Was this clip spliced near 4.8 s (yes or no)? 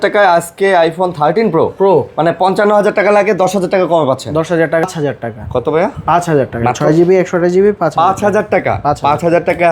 yes